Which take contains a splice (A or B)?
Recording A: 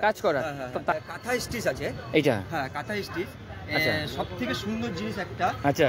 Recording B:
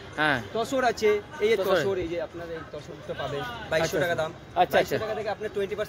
A